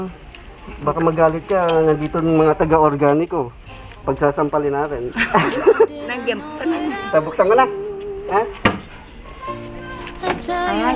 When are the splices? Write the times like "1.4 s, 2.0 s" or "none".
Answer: none